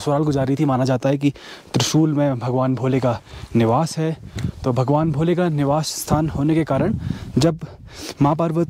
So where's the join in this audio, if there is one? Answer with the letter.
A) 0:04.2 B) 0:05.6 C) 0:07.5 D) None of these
D